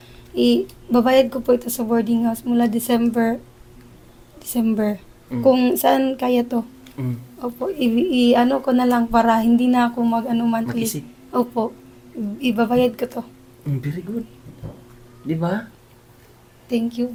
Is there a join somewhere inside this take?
no; 0 cuts

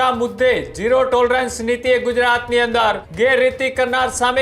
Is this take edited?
yes; 1 cut; at 3.1 s

